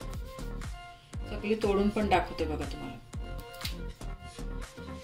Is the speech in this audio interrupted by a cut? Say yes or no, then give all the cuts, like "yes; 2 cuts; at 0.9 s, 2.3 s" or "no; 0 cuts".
yes; 2 cuts; at 1.3 s, 3.0 s